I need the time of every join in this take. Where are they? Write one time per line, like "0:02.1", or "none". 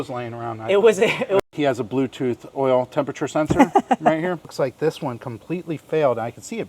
0:01.4
0:04.5